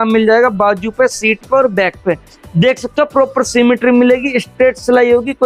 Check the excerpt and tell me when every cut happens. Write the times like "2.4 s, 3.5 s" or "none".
none